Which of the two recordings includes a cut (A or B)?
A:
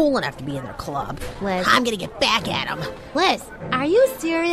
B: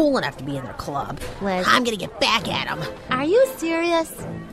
B